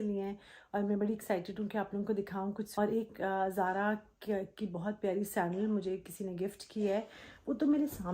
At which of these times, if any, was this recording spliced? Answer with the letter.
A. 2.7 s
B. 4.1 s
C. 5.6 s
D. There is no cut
A